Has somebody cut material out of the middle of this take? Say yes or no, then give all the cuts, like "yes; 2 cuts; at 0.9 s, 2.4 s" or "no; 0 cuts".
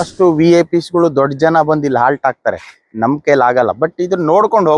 no; 0 cuts